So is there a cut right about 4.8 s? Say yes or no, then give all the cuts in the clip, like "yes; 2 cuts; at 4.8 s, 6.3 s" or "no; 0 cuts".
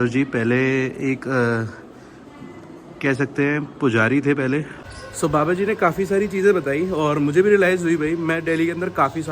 yes; 1 cut; at 4.8 s